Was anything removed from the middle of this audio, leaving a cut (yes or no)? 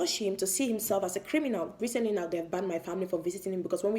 yes